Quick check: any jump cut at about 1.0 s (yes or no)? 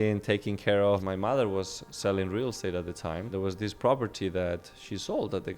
yes